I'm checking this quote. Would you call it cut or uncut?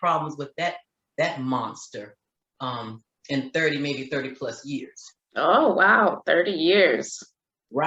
uncut